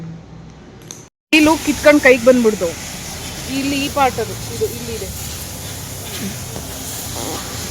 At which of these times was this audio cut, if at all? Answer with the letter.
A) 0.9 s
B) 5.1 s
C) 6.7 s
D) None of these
A